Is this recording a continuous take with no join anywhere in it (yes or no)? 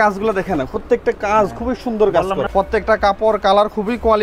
no